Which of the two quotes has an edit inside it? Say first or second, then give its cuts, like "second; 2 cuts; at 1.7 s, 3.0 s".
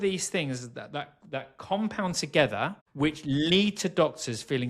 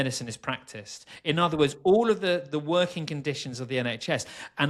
first; 1 cut; at 2.8 s